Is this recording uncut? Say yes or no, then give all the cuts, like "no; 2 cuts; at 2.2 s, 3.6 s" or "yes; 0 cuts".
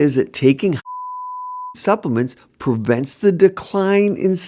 yes; 0 cuts